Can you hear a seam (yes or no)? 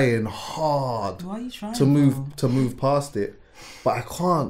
no